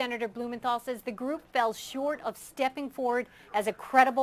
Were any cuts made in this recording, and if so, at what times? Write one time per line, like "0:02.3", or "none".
none